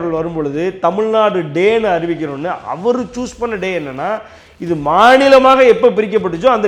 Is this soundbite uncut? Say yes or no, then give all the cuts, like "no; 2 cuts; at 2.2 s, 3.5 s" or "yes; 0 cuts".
yes; 0 cuts